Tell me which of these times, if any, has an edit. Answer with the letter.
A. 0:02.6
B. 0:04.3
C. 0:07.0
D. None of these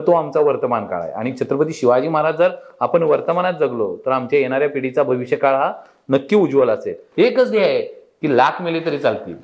C